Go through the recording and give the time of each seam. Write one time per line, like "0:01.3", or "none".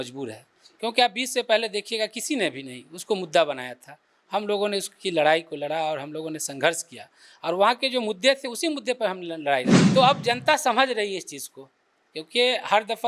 0:09.8